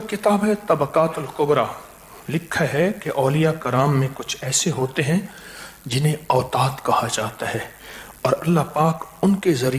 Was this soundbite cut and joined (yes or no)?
no